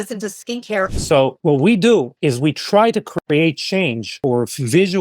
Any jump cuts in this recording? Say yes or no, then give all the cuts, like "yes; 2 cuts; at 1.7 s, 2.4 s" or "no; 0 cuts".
yes; 3 cuts; at 0.9 s, 2.1 s, 4.2 s